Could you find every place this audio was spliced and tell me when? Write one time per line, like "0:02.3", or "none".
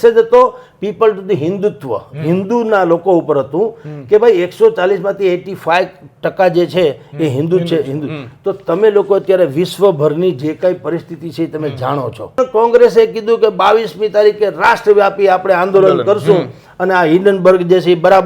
0:12.4